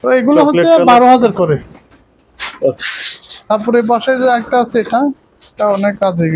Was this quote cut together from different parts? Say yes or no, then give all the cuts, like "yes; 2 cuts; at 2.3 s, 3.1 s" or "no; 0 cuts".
no; 0 cuts